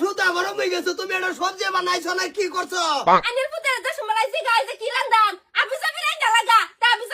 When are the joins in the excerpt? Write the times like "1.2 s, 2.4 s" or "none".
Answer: 3.2 s